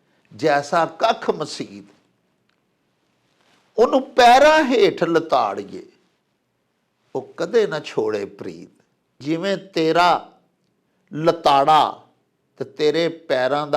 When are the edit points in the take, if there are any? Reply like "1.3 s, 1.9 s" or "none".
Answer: 9.2 s